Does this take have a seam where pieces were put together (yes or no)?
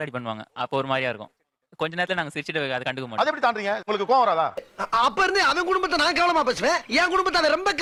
no